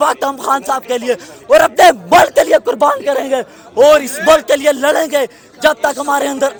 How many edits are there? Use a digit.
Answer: 0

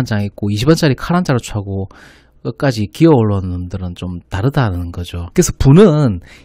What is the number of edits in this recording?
1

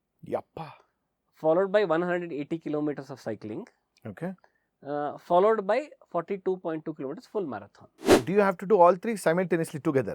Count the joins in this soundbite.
1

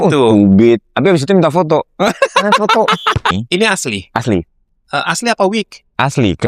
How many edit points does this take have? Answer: 1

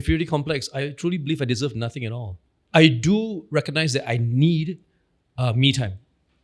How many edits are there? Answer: 2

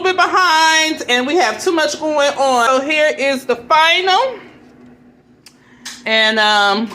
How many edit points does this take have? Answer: 1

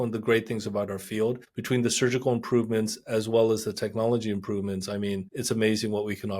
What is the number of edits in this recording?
2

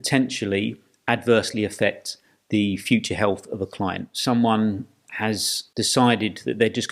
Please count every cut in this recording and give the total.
1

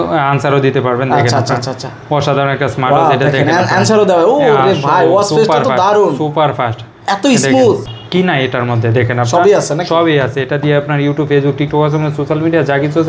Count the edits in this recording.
1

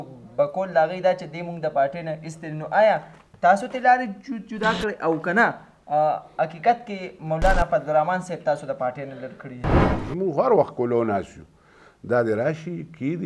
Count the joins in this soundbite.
1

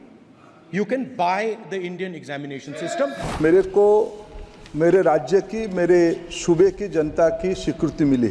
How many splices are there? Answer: 1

